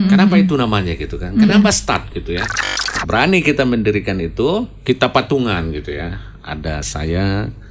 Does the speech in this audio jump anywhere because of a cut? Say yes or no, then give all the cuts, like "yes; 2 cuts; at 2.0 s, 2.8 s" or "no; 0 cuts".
yes; 2 cuts; at 3.0 s, 4.7 s